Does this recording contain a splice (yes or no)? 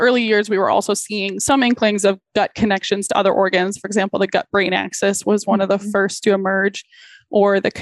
yes